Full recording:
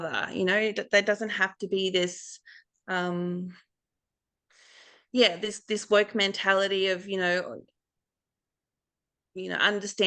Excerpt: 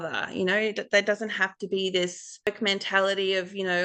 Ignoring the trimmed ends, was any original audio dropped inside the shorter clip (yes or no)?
yes